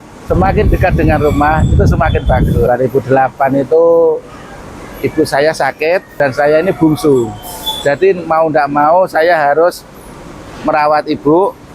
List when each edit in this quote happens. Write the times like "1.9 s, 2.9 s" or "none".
2.7 s, 6.1 s